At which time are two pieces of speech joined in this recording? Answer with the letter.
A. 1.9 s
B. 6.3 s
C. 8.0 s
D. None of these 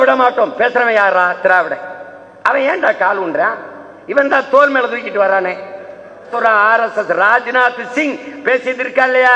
B